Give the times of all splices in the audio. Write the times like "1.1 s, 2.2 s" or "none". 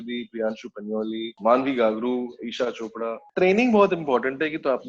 1.3 s, 3.2 s